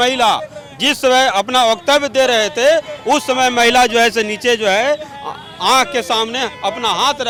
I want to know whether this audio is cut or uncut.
uncut